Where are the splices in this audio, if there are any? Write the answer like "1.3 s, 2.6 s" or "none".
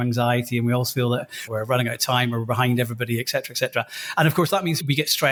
none